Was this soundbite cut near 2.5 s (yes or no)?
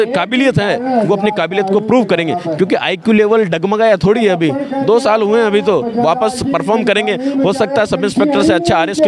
no